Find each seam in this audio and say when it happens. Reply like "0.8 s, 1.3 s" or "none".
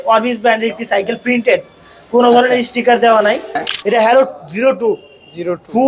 3.7 s